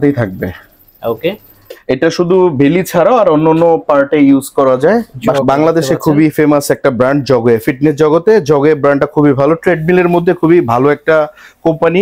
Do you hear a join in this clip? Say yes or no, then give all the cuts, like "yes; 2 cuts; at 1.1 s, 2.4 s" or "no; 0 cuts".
yes; 1 cut; at 5.4 s